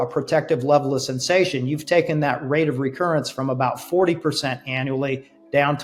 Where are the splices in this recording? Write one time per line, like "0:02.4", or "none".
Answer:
none